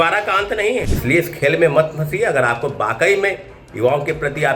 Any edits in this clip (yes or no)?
yes